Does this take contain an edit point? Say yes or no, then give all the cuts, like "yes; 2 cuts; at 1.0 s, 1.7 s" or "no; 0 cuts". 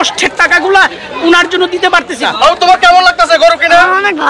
yes; 1 cut; at 2.2 s